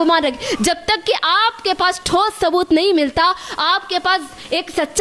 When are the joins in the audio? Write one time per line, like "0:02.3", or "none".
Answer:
none